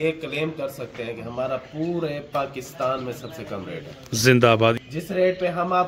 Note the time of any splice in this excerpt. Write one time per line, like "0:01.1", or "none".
0:04.8